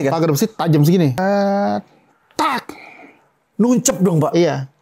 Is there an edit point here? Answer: yes; 1 cut; at 1.2 s

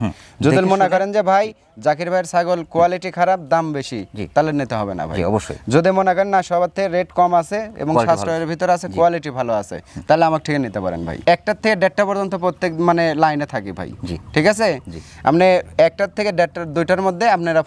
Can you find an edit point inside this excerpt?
no; 0 cuts

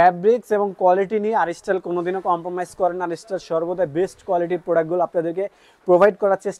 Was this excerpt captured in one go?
yes; 0 cuts

